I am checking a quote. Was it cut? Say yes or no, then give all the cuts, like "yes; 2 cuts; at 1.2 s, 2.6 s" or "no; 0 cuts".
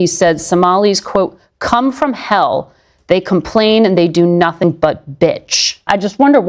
no; 0 cuts